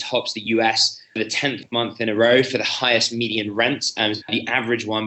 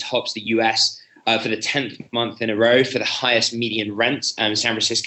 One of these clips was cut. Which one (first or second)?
first